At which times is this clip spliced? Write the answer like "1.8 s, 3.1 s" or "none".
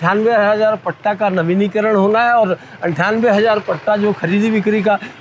none